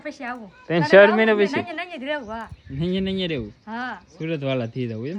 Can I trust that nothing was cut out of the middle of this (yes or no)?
yes